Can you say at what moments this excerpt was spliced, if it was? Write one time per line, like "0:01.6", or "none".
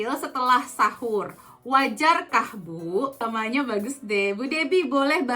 0:03.4